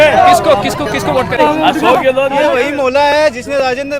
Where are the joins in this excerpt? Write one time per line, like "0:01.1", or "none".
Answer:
0:02.5